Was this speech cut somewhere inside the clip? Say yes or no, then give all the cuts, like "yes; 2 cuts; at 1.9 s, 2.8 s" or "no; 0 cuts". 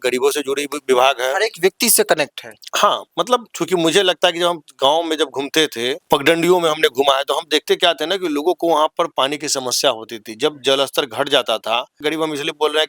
yes; 3 cuts; at 3.5 s, 6.0 s, 12.0 s